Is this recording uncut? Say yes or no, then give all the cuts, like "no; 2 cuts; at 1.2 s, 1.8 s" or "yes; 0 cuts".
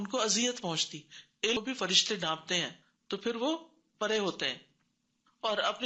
no; 1 cut; at 1.6 s